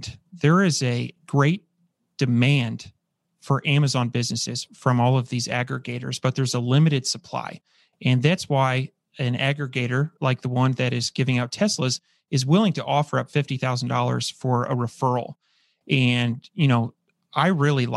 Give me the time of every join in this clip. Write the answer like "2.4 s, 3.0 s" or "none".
none